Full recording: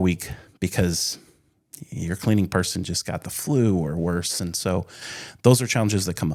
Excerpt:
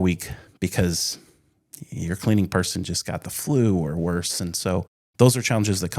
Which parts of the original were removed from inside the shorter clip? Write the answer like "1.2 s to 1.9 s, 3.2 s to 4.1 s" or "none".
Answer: 5.0 s to 5.2 s